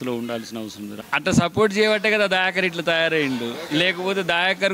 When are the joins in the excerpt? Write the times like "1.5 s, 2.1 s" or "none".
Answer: 0.9 s